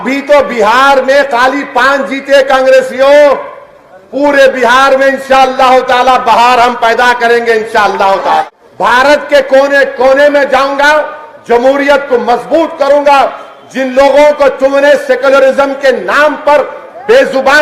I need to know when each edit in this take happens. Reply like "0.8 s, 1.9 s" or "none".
8.4 s